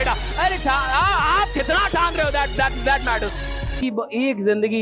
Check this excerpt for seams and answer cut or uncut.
cut